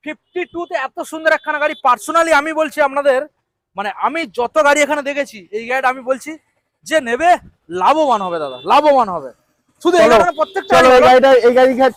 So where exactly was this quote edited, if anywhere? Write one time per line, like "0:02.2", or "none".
none

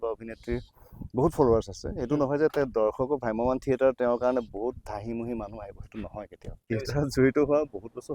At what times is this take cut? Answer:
0:06.7

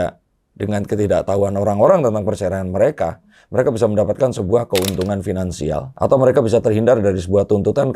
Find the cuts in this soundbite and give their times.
none

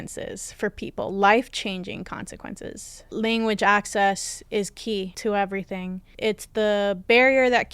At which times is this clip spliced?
0:03.0
0:05.1
0:06.1

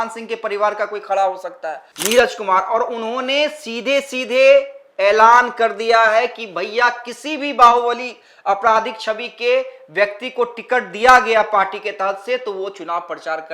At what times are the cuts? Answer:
0:01.8

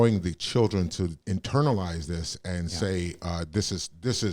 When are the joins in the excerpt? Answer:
0:01.2

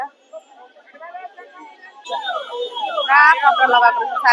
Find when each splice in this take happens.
0:02.0

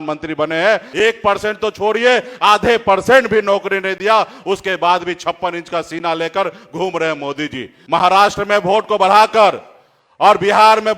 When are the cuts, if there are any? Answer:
0:00.9
0:07.7

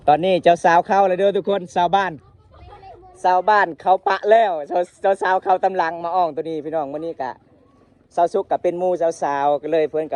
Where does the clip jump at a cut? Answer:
none

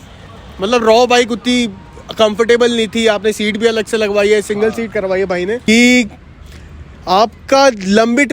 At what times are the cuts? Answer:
0:05.6

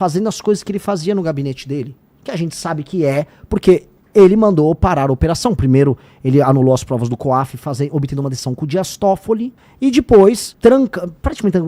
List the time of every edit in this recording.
0:09.6
0:10.5

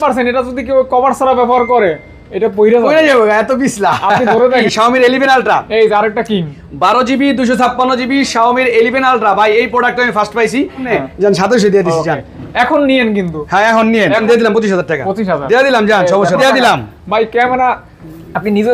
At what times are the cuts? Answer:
0:04.7
0:10.9
0:14.2
0:16.4

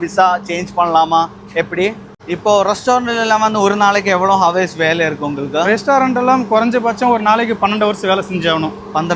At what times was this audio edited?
0:02.1

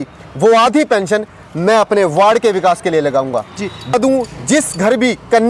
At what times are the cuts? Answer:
0:03.9

